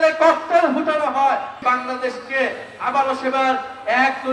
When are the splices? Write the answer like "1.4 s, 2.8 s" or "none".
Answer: 1.5 s